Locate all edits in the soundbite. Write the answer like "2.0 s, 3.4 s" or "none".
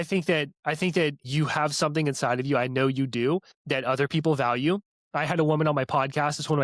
1.2 s, 3.5 s